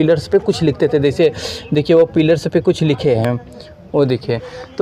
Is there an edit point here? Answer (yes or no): no